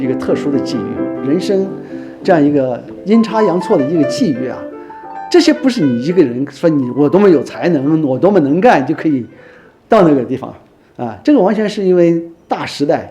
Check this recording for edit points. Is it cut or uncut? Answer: cut